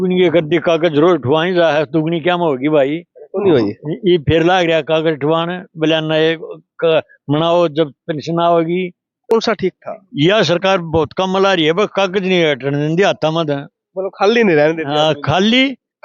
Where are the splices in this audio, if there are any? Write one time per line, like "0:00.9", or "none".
0:09.3